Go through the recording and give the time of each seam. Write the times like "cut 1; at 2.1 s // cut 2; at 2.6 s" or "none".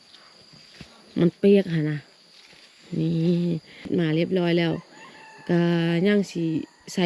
cut 1; at 3.9 s